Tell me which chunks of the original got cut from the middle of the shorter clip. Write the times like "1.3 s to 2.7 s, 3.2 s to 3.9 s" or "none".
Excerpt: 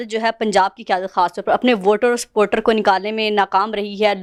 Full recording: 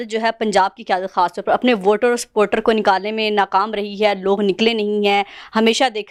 none